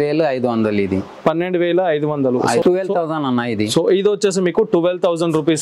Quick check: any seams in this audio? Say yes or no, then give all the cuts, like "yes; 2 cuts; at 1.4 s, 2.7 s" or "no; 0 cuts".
yes; 1 cut; at 2.6 s